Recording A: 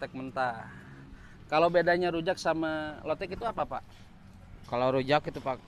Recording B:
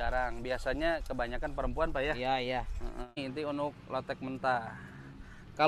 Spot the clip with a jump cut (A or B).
B